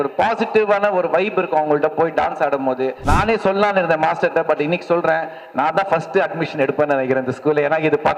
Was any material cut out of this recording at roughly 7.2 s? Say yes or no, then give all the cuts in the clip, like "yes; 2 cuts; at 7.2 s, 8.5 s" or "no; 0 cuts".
no; 1 cut; at 3.0 s